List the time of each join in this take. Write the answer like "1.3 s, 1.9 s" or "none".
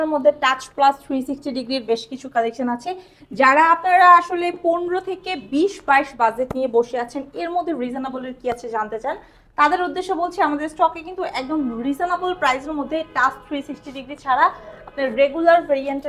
none